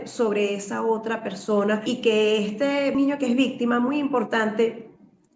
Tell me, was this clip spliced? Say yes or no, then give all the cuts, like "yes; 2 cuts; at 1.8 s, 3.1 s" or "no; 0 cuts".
yes; 2 cuts; at 1.9 s, 2.9 s